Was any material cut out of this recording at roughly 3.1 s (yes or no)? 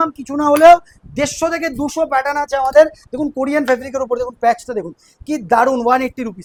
no